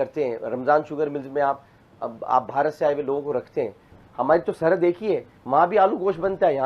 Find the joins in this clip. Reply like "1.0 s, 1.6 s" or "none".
4.0 s